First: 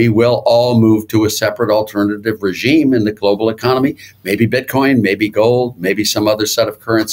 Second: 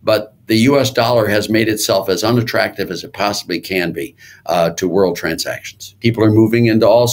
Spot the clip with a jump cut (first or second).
second